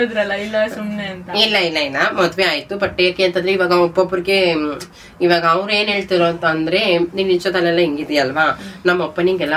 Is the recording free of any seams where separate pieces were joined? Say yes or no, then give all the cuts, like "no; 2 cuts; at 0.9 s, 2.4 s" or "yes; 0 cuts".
yes; 0 cuts